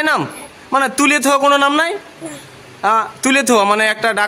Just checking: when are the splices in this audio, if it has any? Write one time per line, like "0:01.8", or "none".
none